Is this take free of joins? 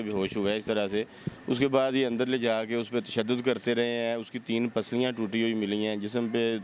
yes; 0 cuts

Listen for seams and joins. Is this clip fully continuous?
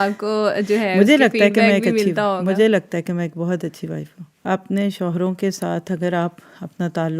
no; 1 cut; at 4.2 s

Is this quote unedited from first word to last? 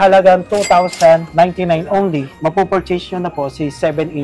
no; 2 cuts; at 1.3 s, 2.3 s

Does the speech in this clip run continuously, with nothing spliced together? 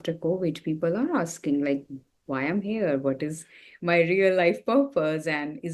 yes; 0 cuts

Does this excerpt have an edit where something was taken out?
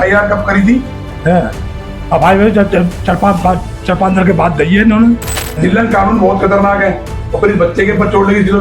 yes; 1 cut; at 5.3 s

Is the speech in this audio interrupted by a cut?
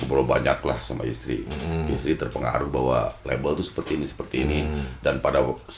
no; 0 cuts

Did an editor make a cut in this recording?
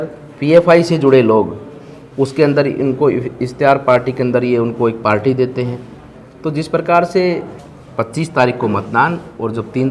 yes; 1 cut; at 7.6 s

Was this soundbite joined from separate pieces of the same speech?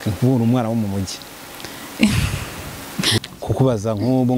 yes; 1 cut; at 3.1 s

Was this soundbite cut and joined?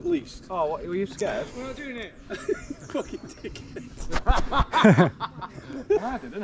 no; 0 cuts

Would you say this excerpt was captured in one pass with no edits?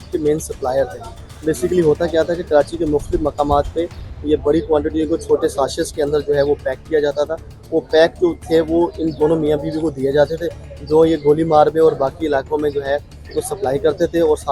yes; 0 cuts

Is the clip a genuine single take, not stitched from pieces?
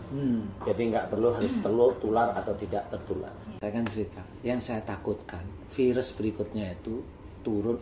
no; 1 cut; at 3.5 s

